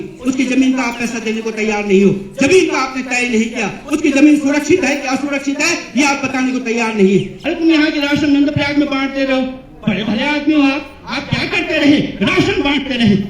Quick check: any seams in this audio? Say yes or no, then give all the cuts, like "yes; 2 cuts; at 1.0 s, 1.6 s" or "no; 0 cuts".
yes; 1 cut; at 7.4 s